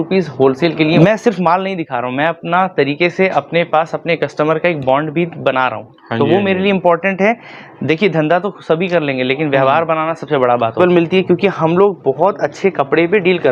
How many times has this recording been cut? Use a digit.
2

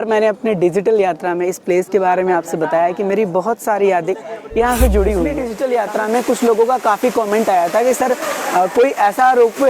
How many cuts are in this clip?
1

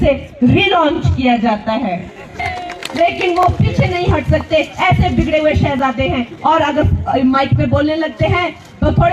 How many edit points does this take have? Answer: 1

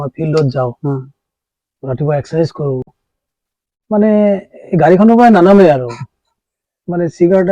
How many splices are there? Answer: 1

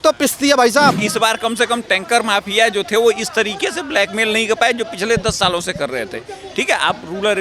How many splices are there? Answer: 1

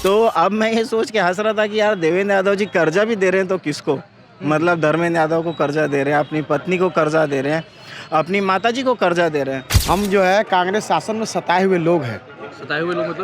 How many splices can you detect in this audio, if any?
1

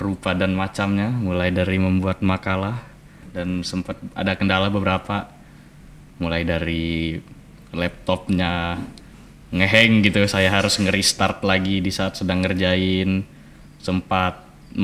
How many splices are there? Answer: 1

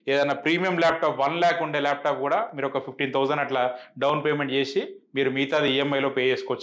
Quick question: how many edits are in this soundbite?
0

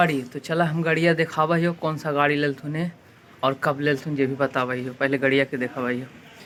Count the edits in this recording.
0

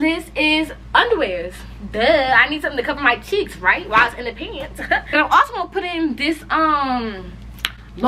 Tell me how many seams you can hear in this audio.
1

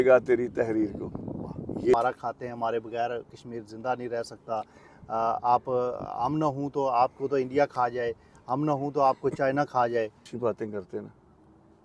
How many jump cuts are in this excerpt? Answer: 2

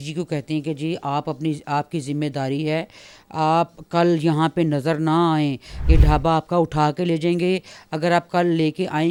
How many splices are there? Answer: 0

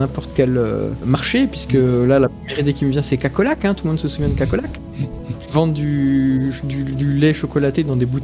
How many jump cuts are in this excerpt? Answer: 2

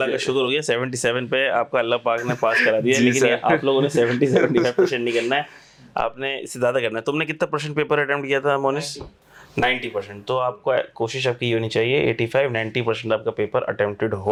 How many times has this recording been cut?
0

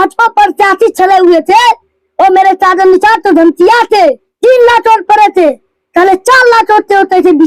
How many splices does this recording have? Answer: 1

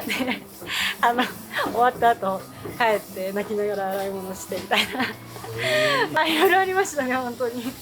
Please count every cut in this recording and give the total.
1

